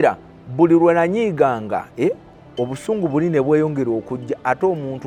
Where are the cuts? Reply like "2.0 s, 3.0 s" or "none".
none